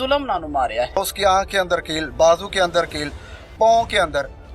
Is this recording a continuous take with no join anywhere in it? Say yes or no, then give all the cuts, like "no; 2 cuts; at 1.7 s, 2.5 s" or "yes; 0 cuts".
no; 1 cut; at 1.0 s